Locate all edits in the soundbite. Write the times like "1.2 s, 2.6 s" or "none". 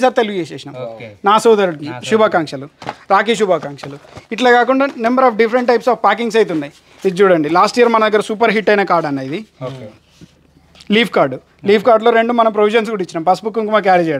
none